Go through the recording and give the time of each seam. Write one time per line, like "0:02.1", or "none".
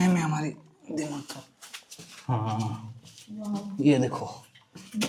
none